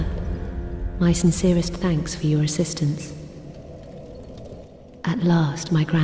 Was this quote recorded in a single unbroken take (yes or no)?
yes